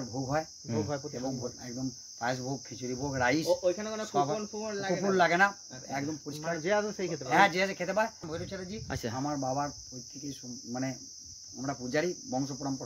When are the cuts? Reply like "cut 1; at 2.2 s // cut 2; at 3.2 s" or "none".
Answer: cut 1; at 8.2 s